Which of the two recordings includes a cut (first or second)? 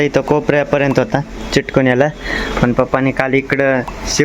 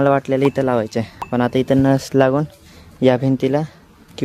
second